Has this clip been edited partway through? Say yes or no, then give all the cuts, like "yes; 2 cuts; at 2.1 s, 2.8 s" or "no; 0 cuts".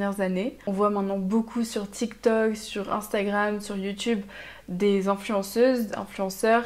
no; 0 cuts